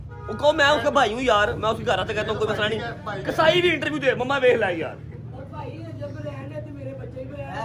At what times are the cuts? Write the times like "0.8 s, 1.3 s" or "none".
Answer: none

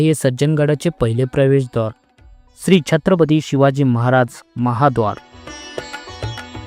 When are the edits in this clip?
none

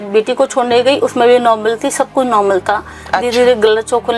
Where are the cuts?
none

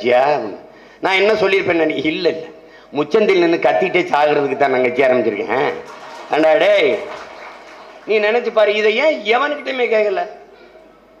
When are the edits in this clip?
none

